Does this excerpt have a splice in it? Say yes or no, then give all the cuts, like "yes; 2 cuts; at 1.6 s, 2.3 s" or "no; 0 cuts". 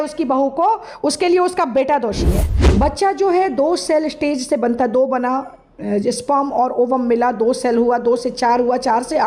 yes; 1 cut; at 2.5 s